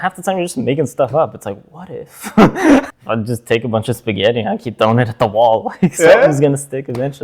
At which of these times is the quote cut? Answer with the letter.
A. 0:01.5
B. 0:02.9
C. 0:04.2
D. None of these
B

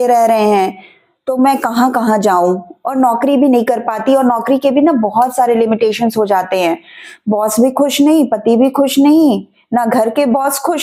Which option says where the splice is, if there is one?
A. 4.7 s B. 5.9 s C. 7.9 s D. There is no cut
D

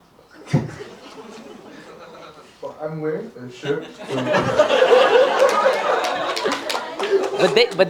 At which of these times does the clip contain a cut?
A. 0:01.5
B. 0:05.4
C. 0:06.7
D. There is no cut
D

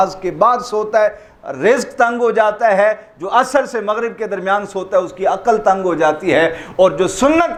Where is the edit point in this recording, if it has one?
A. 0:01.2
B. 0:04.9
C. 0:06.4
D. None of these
D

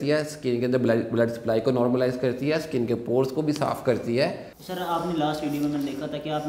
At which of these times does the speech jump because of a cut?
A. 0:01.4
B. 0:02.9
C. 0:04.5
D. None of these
C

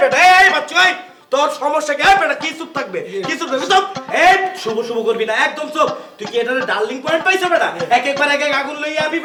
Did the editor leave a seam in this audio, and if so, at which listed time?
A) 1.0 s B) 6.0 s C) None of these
C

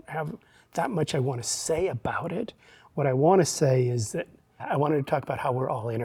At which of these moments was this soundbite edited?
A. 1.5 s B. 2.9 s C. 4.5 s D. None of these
C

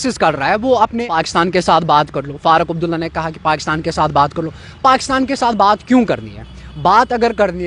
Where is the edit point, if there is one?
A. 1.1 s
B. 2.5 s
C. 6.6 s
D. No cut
A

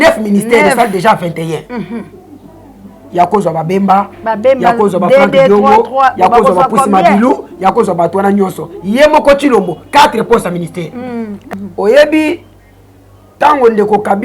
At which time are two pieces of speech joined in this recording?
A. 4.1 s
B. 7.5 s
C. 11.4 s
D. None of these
C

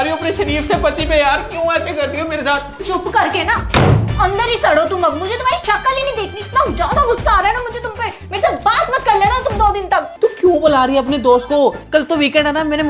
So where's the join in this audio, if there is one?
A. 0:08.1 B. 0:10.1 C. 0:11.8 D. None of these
B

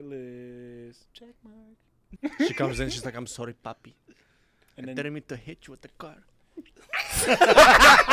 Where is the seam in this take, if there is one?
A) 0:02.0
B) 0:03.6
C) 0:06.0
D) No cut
A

